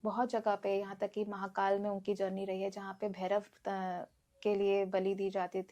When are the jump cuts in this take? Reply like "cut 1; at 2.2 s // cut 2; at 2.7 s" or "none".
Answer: none